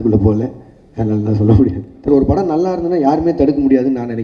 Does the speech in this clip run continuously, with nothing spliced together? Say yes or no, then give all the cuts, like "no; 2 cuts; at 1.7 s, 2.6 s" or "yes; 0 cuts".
no; 1 cut; at 2.1 s